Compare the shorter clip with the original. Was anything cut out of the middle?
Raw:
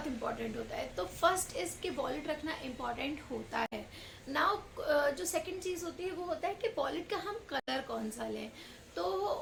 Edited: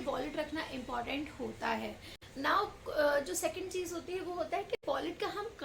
no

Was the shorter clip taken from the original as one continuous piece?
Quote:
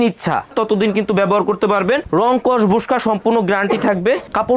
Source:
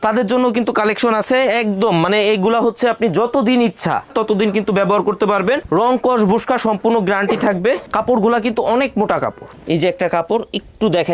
yes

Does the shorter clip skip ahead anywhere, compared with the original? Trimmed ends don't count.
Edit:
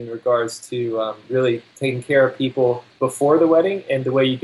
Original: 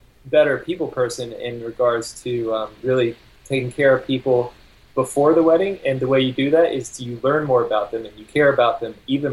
yes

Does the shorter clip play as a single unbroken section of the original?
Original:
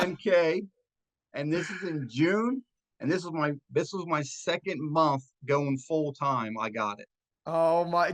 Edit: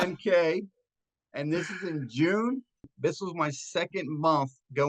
no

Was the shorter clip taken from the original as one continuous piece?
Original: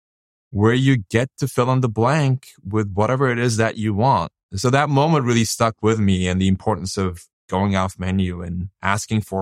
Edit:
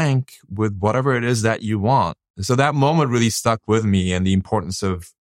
yes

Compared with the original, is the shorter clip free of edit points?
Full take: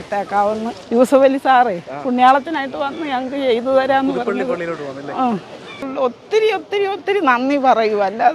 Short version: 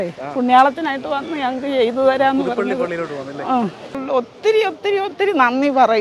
no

